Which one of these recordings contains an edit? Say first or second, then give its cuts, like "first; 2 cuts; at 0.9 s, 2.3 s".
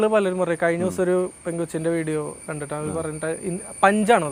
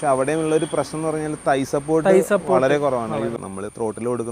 second; 1 cut; at 3.4 s